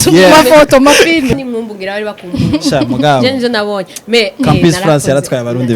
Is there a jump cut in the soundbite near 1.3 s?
yes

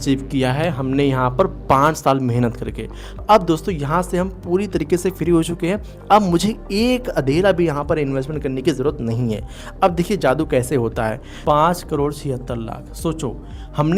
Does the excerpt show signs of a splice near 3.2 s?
yes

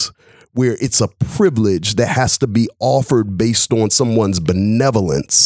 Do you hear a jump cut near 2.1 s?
no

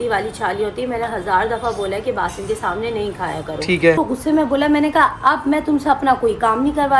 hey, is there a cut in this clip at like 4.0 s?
yes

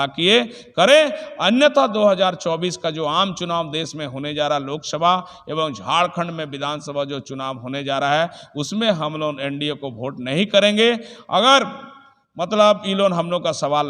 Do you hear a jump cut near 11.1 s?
no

